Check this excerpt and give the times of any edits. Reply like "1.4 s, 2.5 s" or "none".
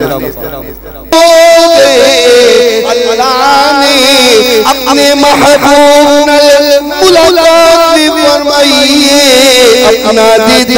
1.1 s